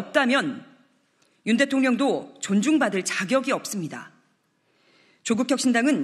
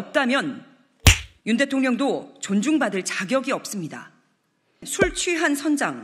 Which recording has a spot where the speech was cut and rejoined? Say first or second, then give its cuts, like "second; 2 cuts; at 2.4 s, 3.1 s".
second; 1 cut; at 4.9 s